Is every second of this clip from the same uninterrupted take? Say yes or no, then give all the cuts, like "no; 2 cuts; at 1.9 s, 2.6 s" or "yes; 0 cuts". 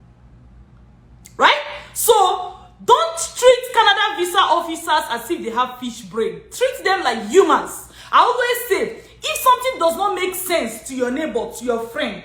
yes; 0 cuts